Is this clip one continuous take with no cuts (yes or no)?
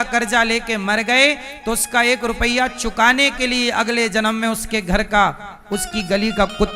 yes